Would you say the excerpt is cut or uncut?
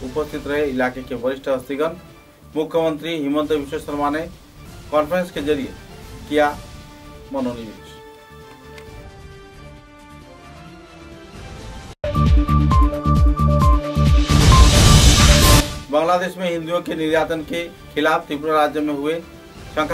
cut